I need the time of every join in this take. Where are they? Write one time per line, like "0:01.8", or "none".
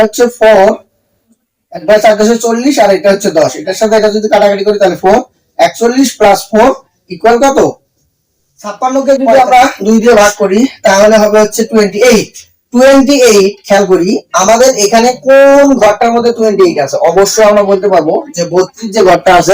0:08.8

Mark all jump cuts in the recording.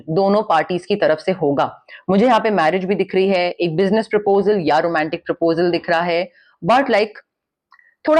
none

